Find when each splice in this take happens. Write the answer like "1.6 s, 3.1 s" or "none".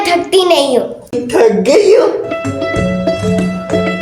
1.0 s, 2.3 s